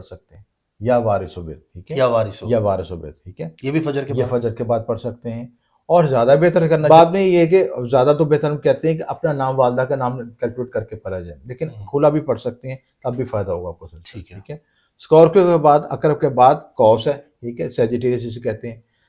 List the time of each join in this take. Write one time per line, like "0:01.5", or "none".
0:06.9